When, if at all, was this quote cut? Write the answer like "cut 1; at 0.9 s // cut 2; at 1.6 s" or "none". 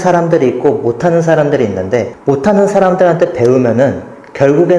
cut 1; at 2.1 s